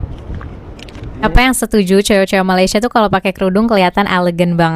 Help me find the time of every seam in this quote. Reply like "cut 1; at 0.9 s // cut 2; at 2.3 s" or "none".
cut 1; at 1.2 s